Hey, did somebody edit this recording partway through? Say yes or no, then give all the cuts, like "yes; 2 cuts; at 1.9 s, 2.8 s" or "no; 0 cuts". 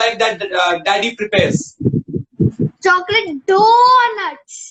no; 0 cuts